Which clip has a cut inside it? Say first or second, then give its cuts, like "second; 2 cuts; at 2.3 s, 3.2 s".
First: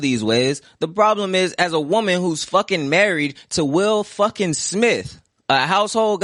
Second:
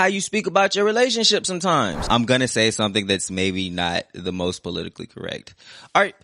second; 1 cut; at 2.1 s